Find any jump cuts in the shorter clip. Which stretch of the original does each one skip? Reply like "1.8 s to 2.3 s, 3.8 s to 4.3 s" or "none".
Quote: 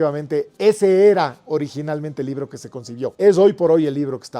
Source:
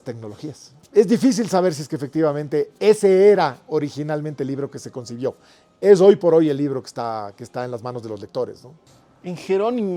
5.3 s to 5.8 s